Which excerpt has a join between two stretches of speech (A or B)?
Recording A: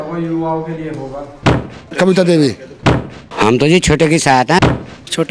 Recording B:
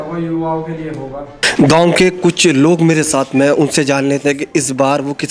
A